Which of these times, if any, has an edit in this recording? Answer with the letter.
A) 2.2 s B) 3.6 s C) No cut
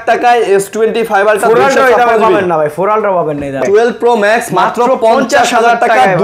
B